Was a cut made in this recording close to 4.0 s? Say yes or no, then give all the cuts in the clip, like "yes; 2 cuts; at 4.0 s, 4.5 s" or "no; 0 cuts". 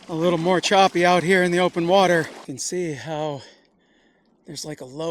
no; 1 cut; at 2.4 s